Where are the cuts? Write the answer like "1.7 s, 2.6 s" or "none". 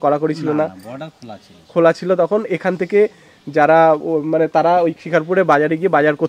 none